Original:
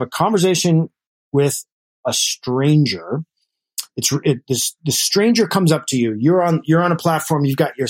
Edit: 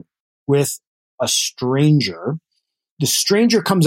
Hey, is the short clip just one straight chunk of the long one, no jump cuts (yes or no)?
no